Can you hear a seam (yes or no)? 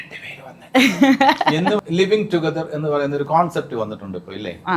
yes